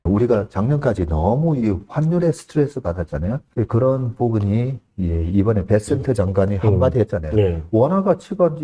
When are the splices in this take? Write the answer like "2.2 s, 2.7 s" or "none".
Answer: 3.4 s